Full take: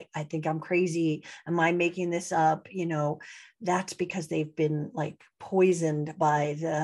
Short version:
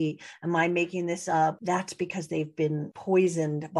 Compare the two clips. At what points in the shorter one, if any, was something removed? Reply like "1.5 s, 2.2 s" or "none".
1.6 s, 2.9 s